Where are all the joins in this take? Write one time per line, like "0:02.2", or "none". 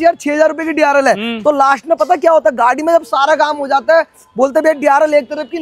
none

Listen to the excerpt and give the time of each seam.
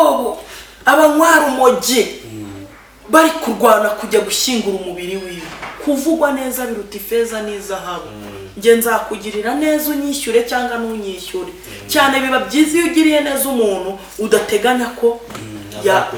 none

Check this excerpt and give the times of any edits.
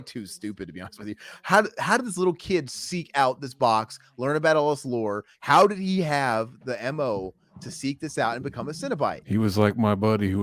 0:05.3
0:09.2

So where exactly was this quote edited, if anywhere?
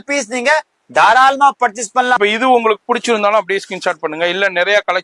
0:02.2

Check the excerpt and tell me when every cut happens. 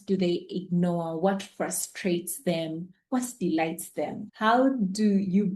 0:04.2

